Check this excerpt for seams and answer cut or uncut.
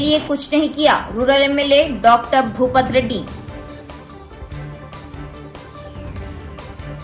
uncut